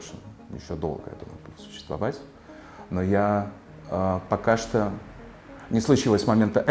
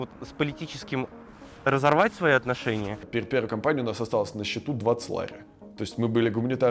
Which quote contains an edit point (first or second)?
second